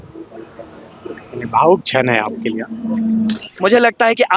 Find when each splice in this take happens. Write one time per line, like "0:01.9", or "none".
0:03.4